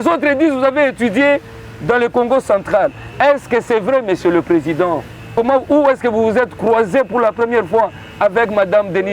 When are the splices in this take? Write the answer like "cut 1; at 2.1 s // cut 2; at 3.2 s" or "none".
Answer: cut 1; at 5.2 s

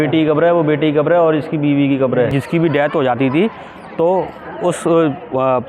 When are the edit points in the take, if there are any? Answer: cut 1; at 2.3 s

